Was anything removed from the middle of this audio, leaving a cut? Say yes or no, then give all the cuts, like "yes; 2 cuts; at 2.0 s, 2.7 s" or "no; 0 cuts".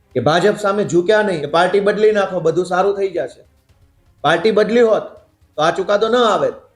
yes; 1 cut; at 1.4 s